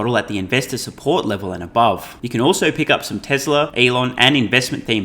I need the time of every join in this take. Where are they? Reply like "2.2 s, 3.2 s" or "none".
2.2 s, 3.7 s